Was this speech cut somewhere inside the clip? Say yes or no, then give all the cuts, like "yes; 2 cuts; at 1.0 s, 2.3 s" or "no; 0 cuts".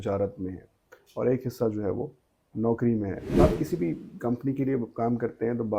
yes; 1 cut; at 3.4 s